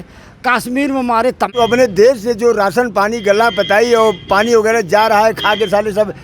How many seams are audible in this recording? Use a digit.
1